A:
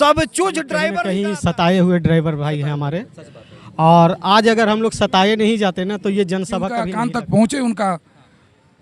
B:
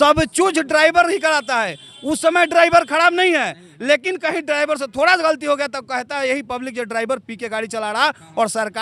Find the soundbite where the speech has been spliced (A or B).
A